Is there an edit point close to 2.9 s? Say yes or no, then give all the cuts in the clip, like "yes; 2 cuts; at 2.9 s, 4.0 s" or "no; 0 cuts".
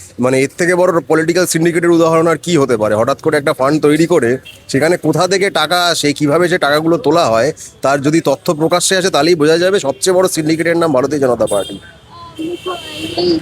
no; 0 cuts